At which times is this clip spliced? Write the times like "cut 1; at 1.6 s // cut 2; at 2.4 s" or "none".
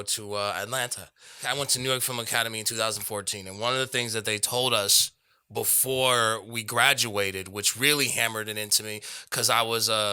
cut 1; at 1.4 s